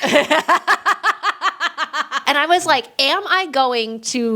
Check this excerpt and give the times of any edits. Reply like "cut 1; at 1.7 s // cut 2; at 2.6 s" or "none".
cut 1; at 2.2 s